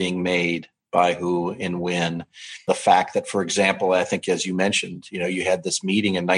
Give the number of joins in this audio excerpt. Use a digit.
1